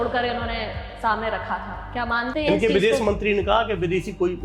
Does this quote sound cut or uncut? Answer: uncut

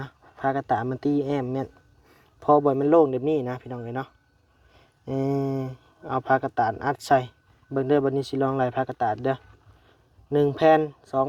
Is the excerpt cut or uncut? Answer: uncut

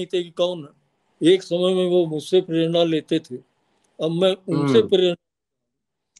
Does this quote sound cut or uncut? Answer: cut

